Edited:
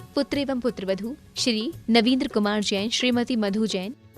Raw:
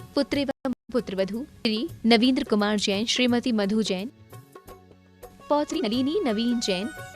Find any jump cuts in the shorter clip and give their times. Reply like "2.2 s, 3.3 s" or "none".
1.0 s